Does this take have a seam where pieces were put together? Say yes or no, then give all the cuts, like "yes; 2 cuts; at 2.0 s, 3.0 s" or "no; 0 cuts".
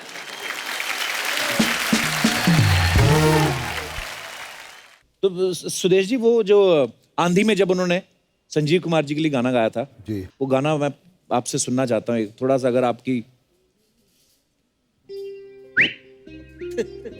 yes; 1 cut; at 4.9 s